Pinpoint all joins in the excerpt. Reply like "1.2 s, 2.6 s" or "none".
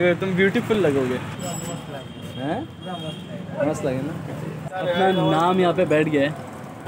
1.4 s, 4.7 s